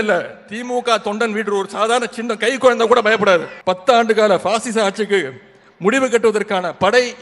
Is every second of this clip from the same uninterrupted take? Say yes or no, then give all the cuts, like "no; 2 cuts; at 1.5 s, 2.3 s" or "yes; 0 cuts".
no; 1 cut; at 3.5 s